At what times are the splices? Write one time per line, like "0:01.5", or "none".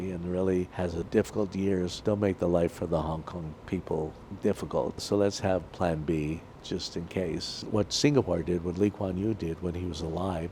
0:01.0
0:01.9
0:04.2
0:05.0
0:07.7